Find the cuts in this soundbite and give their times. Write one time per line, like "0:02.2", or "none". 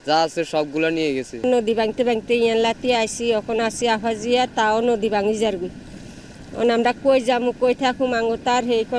none